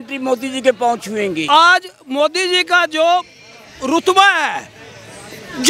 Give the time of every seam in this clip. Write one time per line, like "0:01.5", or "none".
0:01.4